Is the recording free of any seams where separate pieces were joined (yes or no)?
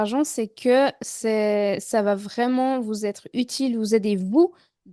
yes